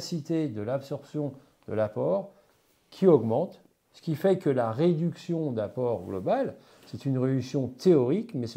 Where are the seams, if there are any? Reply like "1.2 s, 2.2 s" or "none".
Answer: none